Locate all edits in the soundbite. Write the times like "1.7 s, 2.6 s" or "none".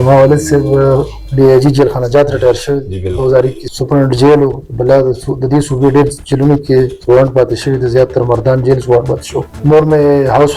3.6 s, 9.5 s